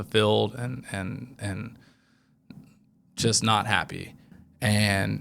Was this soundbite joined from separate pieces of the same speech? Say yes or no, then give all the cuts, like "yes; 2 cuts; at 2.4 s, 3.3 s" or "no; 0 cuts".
yes; 1 cut; at 4.3 s